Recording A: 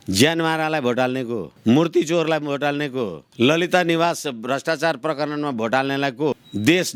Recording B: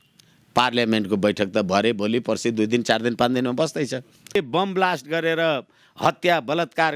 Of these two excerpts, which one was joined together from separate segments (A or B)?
B